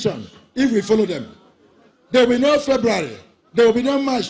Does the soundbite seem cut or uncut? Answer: uncut